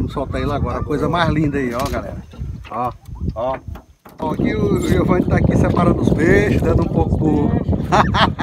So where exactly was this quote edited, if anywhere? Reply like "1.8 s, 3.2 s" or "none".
4.0 s